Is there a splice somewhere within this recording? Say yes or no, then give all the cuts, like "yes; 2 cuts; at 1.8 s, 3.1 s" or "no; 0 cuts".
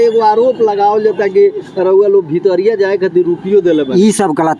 no; 0 cuts